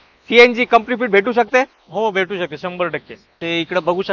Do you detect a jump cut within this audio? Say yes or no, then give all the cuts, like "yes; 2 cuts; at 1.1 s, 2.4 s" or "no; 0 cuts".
yes; 1 cut; at 3.2 s